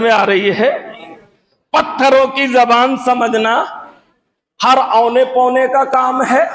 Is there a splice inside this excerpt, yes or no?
no